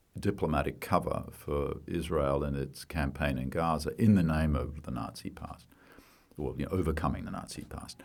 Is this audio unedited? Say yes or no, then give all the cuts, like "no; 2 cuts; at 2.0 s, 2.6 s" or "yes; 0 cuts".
yes; 0 cuts